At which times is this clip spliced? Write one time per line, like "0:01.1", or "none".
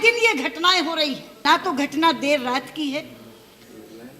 0:01.4